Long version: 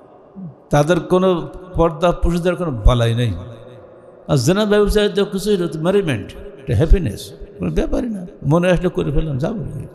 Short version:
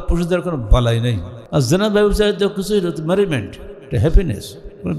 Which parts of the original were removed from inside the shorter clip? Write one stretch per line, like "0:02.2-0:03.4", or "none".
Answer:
0:03.5-0:04.1